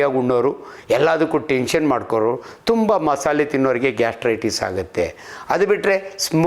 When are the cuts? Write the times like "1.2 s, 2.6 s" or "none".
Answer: none